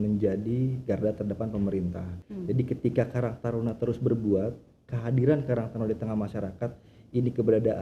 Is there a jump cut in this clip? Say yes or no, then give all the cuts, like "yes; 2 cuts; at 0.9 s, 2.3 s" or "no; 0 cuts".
yes; 1 cut; at 2.1 s